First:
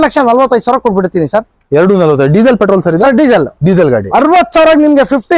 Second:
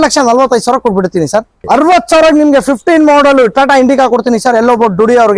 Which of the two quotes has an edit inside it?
second; 1 cut; at 1.6 s

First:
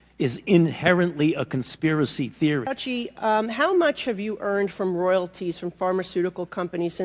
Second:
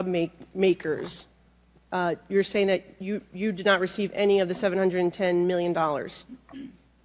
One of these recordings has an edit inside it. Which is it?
first; 1 cut; at 2.8 s

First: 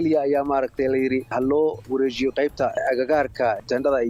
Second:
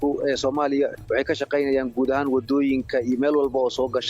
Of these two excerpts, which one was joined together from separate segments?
second; 1 cut; at 1.0 s

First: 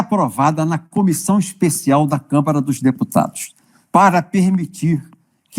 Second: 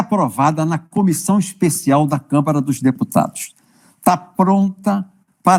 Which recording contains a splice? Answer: first; 1 cut; at 3.7 s

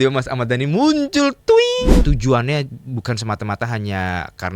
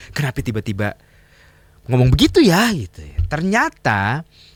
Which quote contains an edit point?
first; 1 cut; at 2.0 s

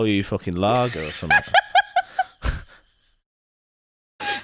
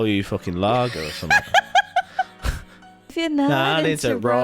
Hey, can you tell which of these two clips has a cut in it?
second; 1 cut; at 3.1 s

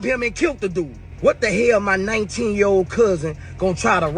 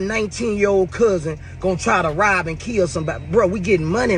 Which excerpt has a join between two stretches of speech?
first; 1 cut; at 1.0 s

